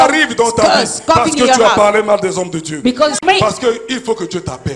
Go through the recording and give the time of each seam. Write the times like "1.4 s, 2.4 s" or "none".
3.2 s